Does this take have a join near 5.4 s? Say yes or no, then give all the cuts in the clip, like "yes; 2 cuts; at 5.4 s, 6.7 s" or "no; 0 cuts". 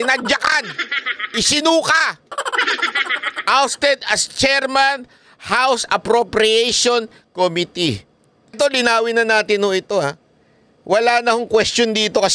no; 1 cut; at 8.6 s